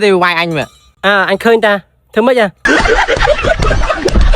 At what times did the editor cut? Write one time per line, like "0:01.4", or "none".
0:02.6